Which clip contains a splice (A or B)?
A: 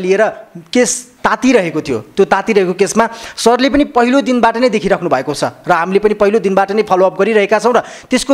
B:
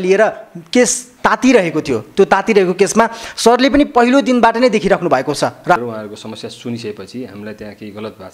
B